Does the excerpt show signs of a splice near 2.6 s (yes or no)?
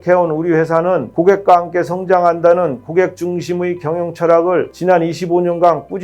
no